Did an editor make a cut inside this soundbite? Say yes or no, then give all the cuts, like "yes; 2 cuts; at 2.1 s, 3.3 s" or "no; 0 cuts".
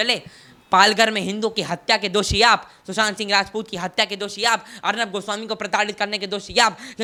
no; 0 cuts